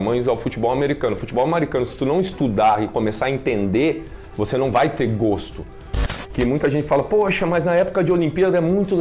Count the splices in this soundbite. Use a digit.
1